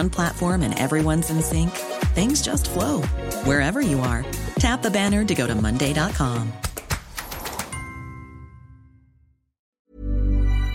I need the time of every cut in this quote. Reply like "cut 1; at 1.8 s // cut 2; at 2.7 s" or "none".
cut 1; at 9.6 s